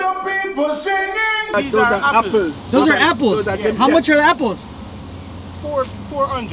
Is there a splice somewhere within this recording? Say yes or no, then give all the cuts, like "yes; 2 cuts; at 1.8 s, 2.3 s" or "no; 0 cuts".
yes; 1 cut; at 1.5 s